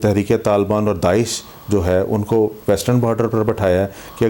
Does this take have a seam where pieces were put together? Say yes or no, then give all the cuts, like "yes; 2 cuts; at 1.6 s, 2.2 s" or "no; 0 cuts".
no; 0 cuts